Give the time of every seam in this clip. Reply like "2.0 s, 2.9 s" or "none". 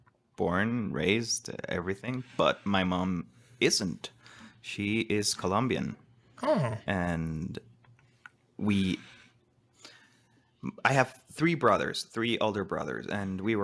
none